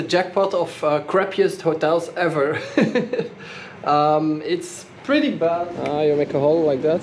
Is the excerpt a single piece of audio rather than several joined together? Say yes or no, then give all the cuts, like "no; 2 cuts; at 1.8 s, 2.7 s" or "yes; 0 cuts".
no; 1 cut; at 5.8 s